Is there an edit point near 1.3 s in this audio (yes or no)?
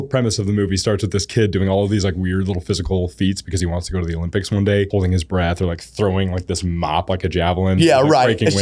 no